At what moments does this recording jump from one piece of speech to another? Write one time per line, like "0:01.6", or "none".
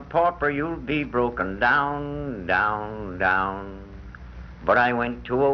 0:01.7